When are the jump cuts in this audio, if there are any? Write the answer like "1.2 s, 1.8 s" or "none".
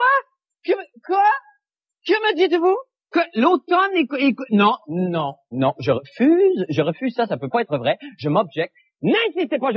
5.8 s